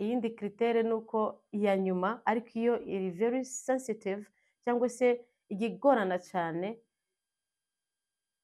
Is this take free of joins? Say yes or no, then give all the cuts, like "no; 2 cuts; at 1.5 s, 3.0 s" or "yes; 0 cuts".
yes; 0 cuts